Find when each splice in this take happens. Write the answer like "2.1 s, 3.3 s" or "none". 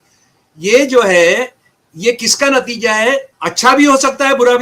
3.3 s